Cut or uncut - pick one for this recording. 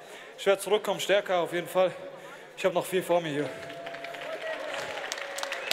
uncut